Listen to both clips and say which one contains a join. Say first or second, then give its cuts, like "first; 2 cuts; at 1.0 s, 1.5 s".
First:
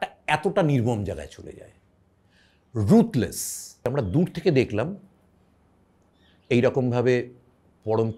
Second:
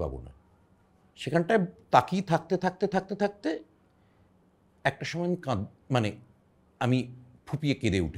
first; 1 cut; at 3.8 s